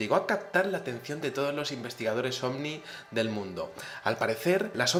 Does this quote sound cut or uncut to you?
uncut